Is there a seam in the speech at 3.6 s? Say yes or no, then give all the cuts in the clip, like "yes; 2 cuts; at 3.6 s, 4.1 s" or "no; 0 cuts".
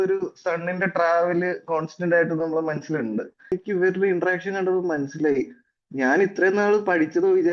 yes; 1 cut; at 3.6 s